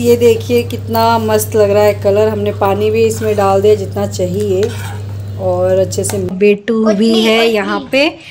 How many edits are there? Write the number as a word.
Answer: one